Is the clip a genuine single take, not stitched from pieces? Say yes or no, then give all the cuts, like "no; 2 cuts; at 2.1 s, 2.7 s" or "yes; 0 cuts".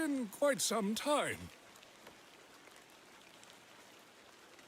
no; 1 cut; at 1.8 s